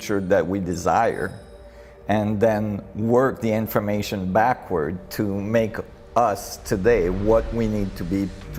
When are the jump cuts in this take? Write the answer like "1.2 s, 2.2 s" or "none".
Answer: none